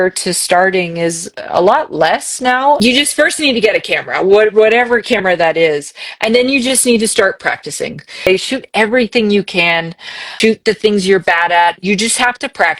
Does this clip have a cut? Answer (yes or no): yes